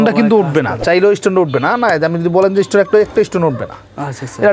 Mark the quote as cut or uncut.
uncut